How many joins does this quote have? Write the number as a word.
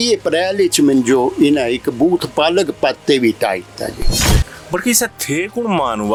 zero